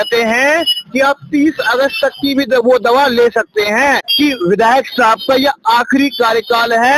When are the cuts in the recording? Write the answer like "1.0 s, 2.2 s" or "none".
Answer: 4.1 s